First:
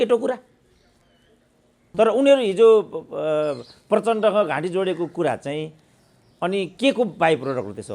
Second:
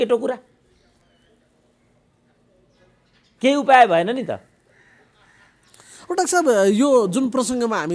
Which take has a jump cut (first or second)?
first